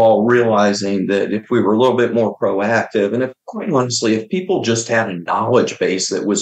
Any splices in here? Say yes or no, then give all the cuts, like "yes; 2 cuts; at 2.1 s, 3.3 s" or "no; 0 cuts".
no; 0 cuts